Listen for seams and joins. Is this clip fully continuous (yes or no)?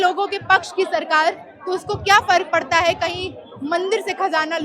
yes